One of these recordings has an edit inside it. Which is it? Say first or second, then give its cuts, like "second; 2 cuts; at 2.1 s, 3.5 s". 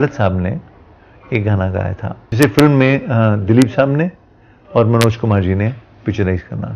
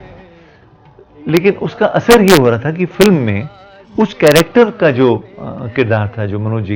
first; 1 cut; at 2.2 s